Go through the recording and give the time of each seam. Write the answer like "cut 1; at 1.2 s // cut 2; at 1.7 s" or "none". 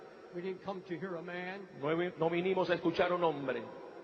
none

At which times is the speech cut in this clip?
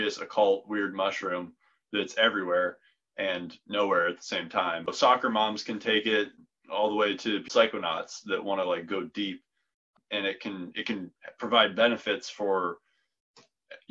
cut 1; at 4.9 s // cut 2; at 6.3 s // cut 3; at 7.5 s // cut 4; at 9.9 s

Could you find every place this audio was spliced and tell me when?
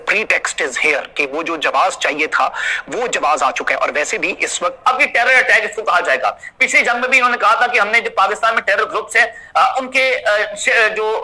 cut 1; at 4.8 s

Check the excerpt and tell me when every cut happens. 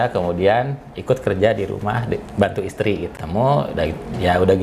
cut 1; at 3.1 s

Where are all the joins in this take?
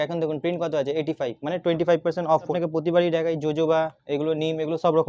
cut 1; at 2.5 s

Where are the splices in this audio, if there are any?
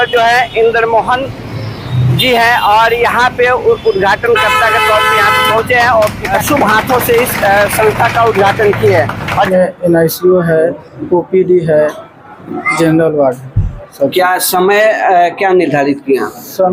cut 1; at 9.5 s

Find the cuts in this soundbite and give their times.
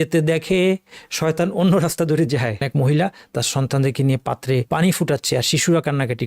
cut 1; at 2.6 s // cut 2; at 4.7 s

